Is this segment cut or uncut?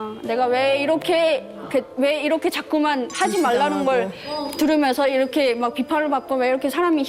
uncut